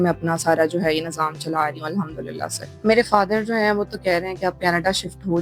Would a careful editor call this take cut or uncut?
cut